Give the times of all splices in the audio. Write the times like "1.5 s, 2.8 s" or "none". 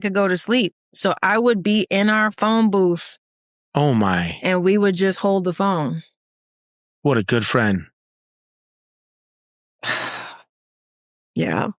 none